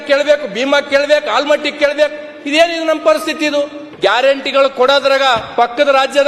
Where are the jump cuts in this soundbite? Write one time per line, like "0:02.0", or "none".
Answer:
0:03.8